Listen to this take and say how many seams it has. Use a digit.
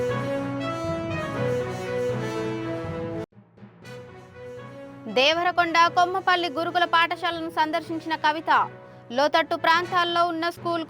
2